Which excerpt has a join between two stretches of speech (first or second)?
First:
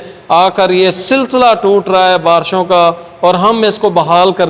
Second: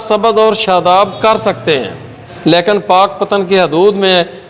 second